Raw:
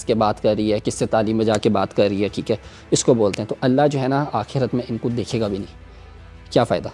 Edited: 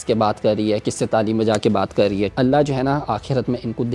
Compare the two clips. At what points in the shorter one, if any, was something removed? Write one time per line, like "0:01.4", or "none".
0:02.3

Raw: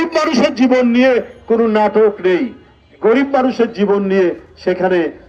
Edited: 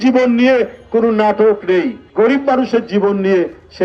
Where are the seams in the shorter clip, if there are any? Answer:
0:02.0

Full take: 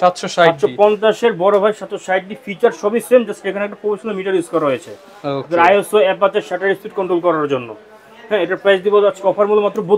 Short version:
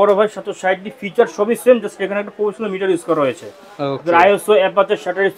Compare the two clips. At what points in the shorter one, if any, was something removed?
none

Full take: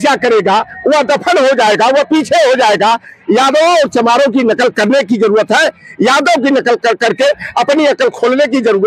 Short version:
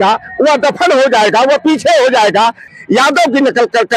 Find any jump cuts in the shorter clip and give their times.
0:02.7

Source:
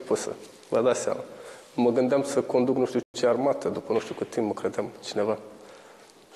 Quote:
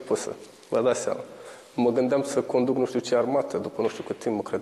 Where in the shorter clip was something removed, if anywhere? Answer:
0:03.0

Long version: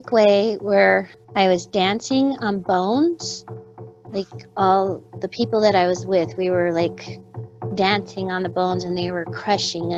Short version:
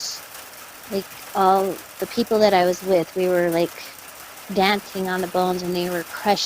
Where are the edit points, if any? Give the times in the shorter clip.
none

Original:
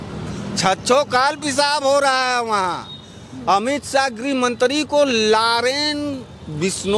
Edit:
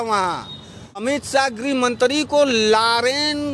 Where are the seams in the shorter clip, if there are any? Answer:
0:01.0

